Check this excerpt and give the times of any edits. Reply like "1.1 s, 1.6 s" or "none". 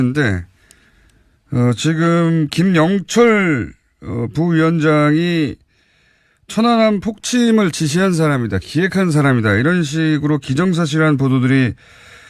10.5 s